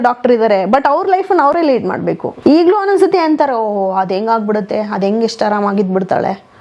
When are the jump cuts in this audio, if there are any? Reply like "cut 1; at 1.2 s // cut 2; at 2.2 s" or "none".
cut 1; at 2.3 s